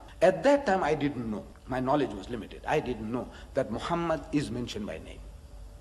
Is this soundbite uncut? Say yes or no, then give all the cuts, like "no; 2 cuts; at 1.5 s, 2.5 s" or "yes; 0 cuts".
no; 1 cut; at 1.5 s